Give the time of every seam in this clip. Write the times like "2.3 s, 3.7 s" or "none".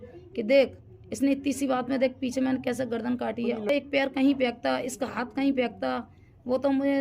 3.7 s